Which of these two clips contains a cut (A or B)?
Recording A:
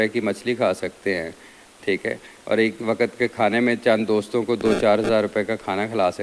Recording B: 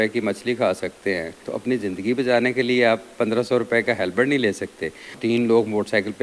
B